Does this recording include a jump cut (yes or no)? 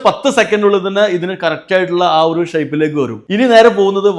yes